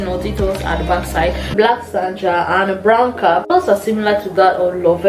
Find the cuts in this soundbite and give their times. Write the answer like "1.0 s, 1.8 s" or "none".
1.5 s